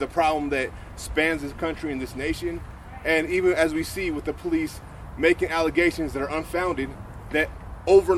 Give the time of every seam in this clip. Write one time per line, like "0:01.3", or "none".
none